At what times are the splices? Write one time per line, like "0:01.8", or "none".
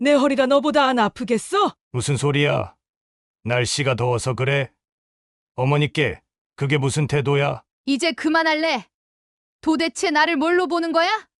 0:01.8
0:07.7

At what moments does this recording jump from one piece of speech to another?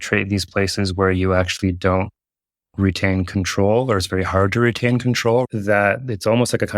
0:05.4

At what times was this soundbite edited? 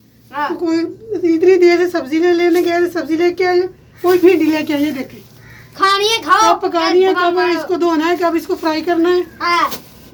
none

